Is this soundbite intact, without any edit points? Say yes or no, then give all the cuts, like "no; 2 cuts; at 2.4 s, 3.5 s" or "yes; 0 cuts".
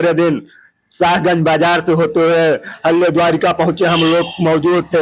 yes; 0 cuts